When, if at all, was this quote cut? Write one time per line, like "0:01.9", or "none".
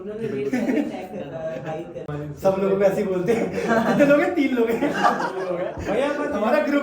0:02.1

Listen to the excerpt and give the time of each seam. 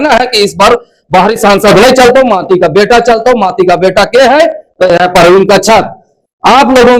none

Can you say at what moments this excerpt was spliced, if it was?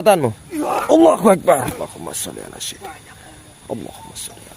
0:01.8

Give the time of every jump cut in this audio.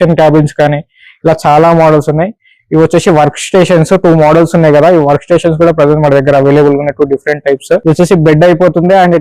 0:07.8

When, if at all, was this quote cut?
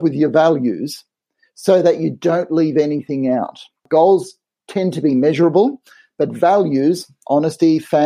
0:03.8

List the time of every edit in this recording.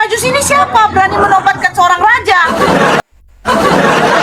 0:03.0

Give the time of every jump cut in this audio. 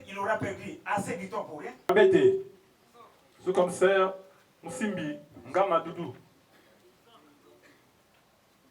0:01.8

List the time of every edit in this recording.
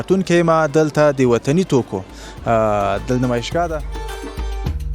0:03.9

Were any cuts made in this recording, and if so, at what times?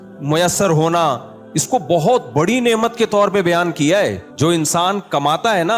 0:04.2

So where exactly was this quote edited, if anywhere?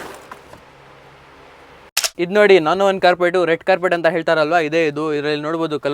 0:01.8

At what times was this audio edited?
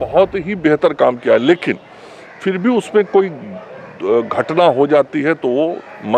none

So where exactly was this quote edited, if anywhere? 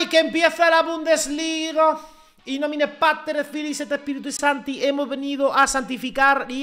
none

